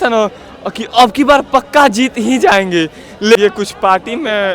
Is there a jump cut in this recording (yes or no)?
yes